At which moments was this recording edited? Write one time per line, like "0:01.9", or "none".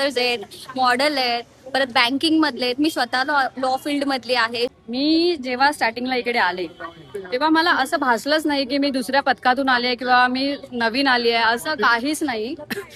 0:04.8